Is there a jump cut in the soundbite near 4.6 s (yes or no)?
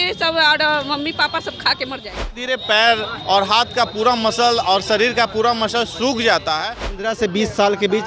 no